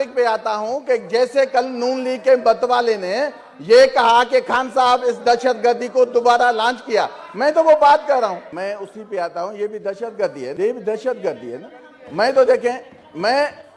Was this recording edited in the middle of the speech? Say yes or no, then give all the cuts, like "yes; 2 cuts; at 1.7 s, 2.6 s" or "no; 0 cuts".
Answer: yes; 2 cuts; at 8.5 s, 10.5 s